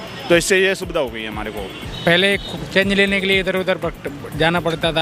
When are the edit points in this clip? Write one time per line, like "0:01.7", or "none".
0:01.8